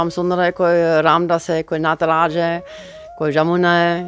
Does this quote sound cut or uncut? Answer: uncut